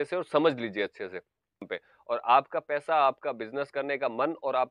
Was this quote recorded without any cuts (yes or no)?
no